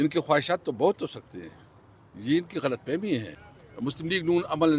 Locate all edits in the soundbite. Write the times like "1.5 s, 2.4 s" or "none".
3.3 s